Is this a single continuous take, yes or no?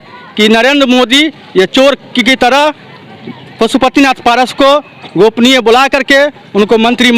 yes